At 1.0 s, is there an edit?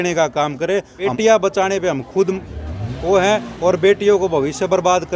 yes; 1 cut; at 1.0 s

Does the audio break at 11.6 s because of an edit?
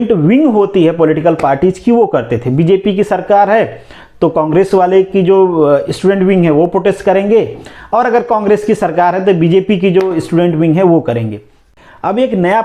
yes; 1 cut; at 11.6 s

